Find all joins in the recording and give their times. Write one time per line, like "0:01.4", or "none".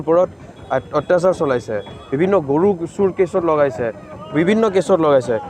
none